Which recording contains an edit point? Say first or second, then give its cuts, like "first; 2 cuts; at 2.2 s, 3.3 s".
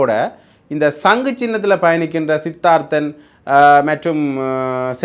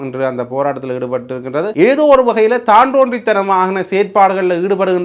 second; 1 cut; at 1.6 s